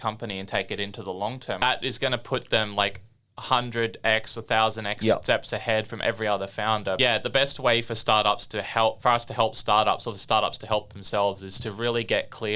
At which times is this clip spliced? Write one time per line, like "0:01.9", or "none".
0:01.6
0:07.0